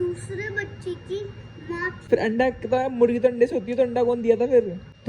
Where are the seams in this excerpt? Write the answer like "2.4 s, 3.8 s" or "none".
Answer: 2.0 s